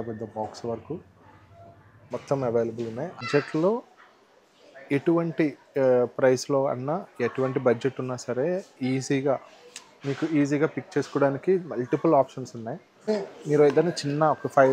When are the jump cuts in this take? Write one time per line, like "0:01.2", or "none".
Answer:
0:03.3
0:13.1